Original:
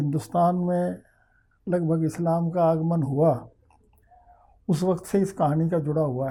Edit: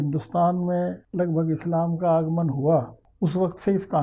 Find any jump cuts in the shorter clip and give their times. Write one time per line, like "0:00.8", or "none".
0:01.0
0:03.0